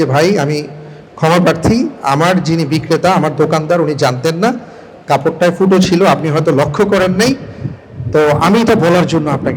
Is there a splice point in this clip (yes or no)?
no